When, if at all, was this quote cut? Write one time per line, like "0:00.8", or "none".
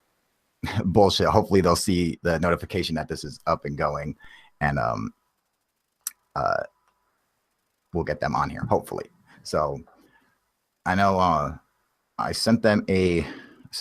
0:08.5

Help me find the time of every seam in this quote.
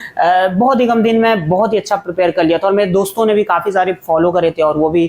none

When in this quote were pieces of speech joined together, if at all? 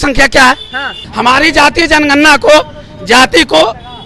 0:01.0

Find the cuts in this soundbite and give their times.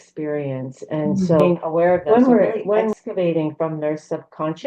0:02.9

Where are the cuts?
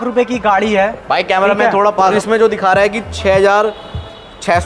0:02.1

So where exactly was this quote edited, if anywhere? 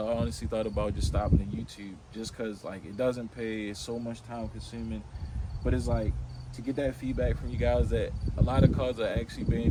none

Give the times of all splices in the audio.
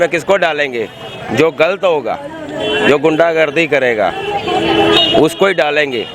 none

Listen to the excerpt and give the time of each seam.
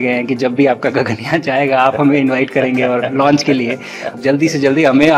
0:04.1

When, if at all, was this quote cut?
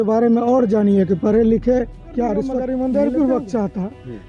0:02.6

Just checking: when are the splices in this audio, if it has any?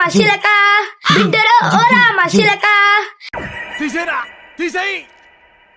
none

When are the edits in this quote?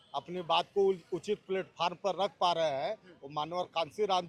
none

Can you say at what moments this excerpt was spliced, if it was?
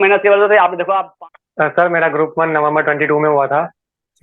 0:01.1

